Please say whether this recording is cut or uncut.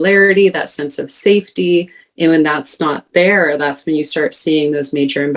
uncut